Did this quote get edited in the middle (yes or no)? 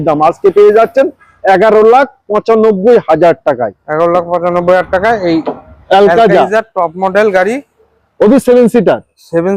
no